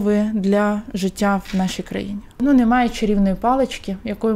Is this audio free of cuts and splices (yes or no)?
no